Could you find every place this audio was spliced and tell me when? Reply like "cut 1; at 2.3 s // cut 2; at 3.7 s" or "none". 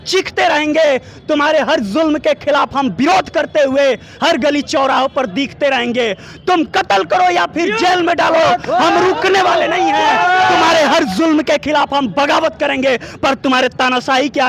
none